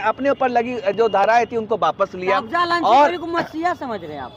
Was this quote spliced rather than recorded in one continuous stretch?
no; 0 cuts

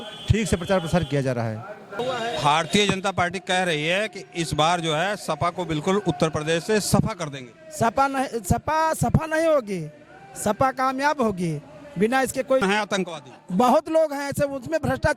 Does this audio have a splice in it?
yes; 2 cuts; at 1.9 s, 12.6 s

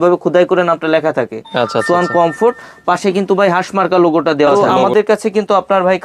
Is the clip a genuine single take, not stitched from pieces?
no; 1 cut; at 4.8 s

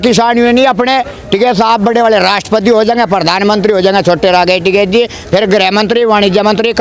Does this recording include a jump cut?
no; 0 cuts

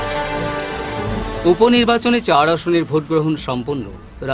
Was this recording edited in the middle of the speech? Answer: no; 0 cuts

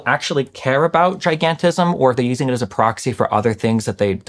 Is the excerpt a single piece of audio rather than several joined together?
no; 1 cut; at 2.0 s

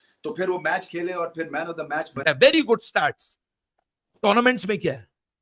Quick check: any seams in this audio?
yes; 1 cut; at 2.2 s

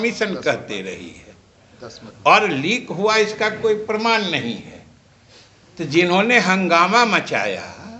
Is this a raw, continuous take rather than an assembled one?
yes; 0 cuts

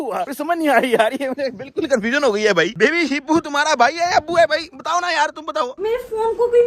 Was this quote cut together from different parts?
yes; 2 cuts; at 2.7 s, 5.7 s

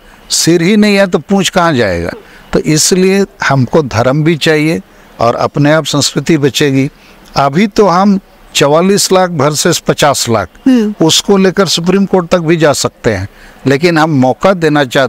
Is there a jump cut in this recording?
no; 0 cuts

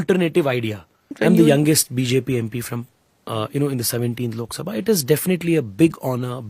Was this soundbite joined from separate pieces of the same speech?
yes; 1 cut; at 1.1 s

